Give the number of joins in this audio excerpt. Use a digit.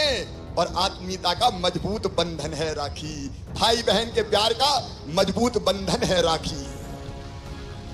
1